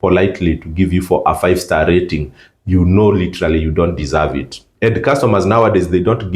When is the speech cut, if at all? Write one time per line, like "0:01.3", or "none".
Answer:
0:04.6